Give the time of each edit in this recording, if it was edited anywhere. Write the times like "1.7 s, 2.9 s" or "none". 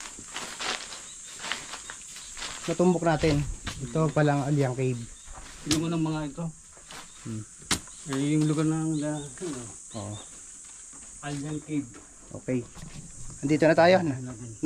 none